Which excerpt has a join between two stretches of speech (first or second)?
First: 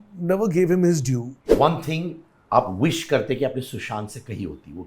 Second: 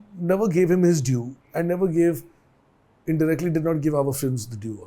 first